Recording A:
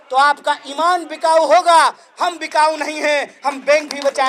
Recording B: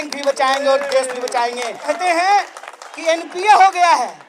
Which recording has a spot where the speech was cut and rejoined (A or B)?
B